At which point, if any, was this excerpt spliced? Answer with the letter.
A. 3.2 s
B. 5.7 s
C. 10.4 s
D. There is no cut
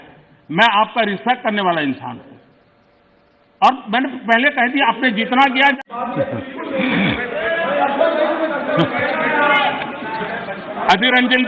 B